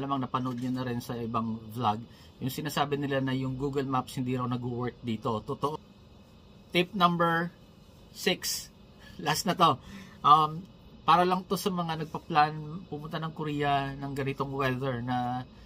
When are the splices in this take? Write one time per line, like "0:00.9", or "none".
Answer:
0:05.7